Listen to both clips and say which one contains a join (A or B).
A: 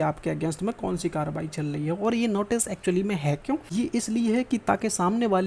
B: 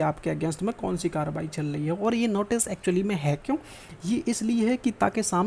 A